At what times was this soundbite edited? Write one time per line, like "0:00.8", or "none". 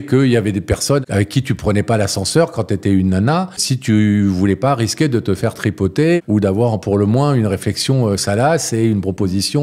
0:01.0
0:03.7
0:06.2

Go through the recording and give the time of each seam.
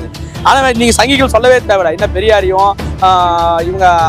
none

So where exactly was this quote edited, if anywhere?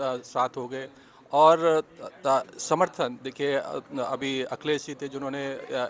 none

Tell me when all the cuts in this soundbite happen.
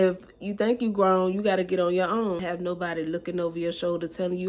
0:02.4

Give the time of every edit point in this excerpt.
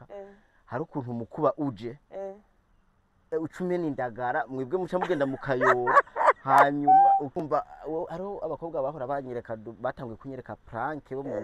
0:07.4

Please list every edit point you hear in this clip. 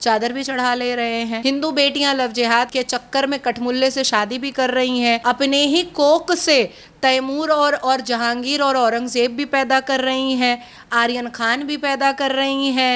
0:01.4
0:02.7
0:05.2

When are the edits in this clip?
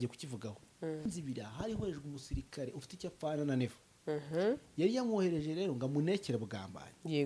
0:01.1

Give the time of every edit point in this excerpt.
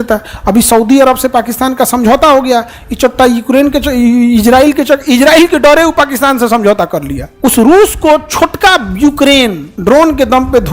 0:07.2
0:09.7

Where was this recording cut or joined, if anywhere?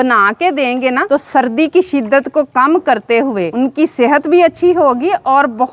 0:01.0
0:03.5

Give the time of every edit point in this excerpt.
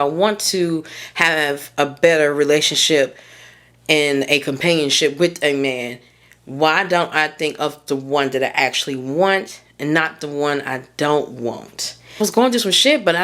0:12.2

